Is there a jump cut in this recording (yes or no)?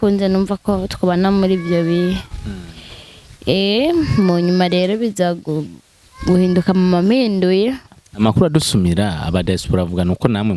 yes